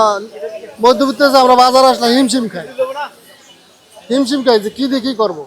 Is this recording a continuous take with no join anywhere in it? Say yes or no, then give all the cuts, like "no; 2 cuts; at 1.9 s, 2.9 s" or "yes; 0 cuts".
yes; 0 cuts